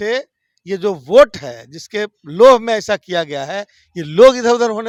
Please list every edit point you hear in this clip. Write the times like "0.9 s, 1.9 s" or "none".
none